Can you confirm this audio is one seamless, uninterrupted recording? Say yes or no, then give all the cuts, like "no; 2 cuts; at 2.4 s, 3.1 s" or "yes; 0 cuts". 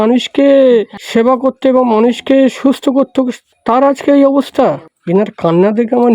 no; 2 cuts; at 1.0 s, 4.9 s